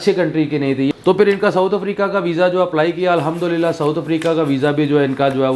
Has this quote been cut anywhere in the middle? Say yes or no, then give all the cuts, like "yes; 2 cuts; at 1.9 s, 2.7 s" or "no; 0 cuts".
yes; 1 cut; at 1.0 s